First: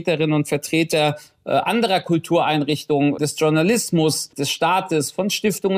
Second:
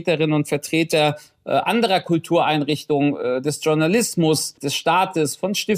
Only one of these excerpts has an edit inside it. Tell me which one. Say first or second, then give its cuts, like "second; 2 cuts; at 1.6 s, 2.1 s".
first; 1 cut; at 3.2 s